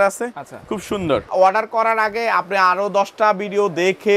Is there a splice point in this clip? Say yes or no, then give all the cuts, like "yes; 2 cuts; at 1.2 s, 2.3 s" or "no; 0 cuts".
yes; 1 cut; at 1.3 s